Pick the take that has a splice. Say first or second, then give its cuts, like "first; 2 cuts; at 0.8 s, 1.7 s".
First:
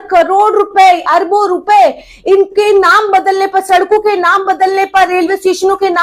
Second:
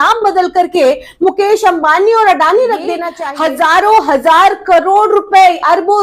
second; 1 cut; at 3.1 s